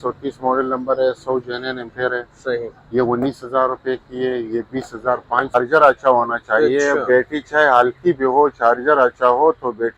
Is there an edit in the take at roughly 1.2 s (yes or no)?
no